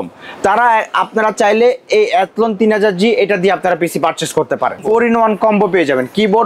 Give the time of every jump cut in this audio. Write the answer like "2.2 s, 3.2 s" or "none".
4.8 s